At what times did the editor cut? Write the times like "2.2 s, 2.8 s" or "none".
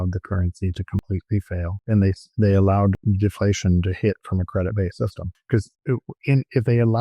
1.3 s, 3.0 s, 5.6 s